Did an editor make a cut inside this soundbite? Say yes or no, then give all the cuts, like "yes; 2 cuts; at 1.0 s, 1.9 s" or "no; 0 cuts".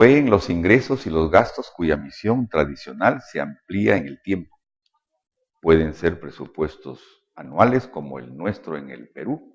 no; 0 cuts